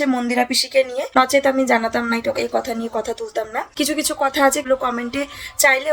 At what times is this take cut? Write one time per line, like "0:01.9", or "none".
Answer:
0:01.1
0:03.6
0:04.6